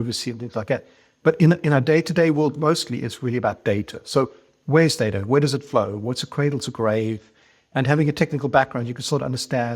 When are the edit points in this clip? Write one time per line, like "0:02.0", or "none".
none

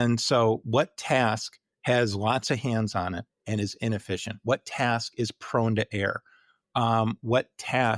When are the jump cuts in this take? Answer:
none

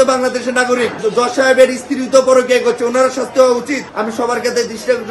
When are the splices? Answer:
0:01.0
0:03.9

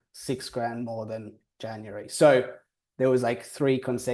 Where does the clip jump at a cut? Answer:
none

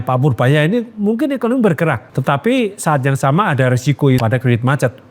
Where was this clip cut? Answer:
0:02.0
0:04.2

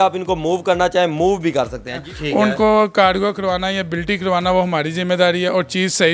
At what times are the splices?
0:02.1

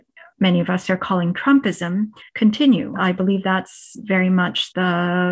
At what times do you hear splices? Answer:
0:02.9

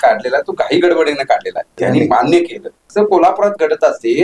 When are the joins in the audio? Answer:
0:01.7
0:02.9

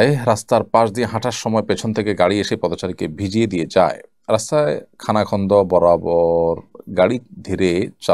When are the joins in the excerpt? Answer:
none

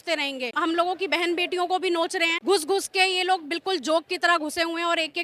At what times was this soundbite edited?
0:02.3

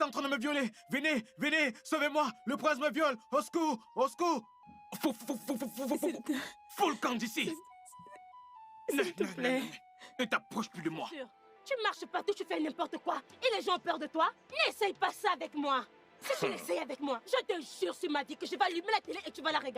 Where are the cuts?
0:04.6
0:11.5

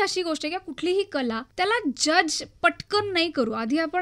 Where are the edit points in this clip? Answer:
0:01.5

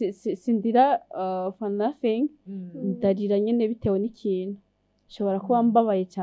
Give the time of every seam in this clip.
none

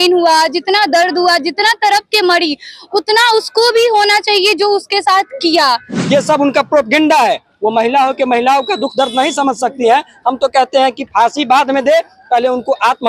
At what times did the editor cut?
0:05.9

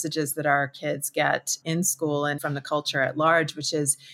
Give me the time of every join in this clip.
0:02.4

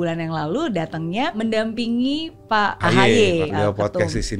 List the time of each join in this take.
0:01.4
0:02.8
0:03.5

